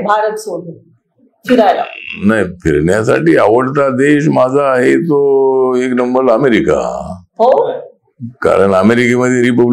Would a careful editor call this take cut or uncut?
uncut